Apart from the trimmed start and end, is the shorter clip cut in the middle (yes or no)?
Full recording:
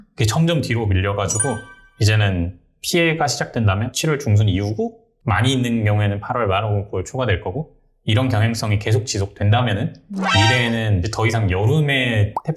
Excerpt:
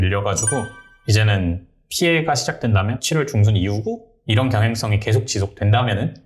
yes